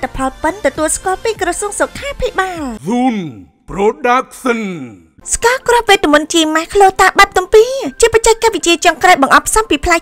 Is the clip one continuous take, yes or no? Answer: no